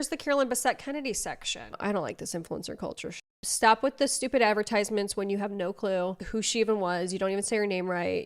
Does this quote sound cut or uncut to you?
cut